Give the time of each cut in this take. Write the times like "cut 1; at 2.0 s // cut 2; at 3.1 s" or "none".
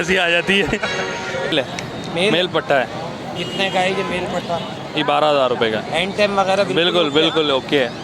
cut 1; at 1.5 s